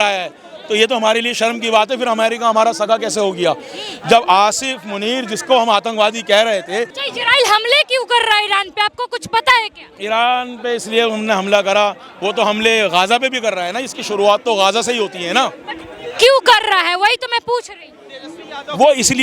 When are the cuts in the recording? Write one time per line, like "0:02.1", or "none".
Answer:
0:06.9